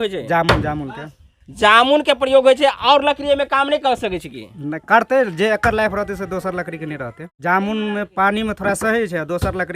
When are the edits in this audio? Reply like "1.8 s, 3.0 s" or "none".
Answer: 7.3 s